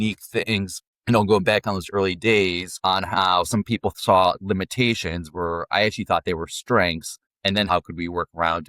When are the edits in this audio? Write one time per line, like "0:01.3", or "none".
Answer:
0:07.7